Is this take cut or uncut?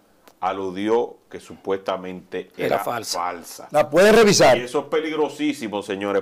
uncut